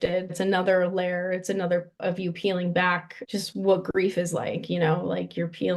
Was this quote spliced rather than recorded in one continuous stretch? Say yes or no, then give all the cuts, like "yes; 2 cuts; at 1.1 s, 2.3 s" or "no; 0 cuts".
yes; 2 cuts; at 1.9 s, 3.1 s